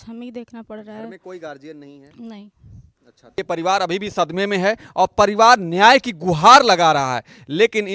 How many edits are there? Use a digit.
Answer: 1